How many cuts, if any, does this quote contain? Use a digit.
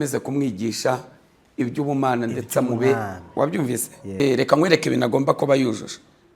1